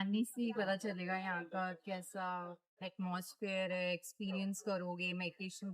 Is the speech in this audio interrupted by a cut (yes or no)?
no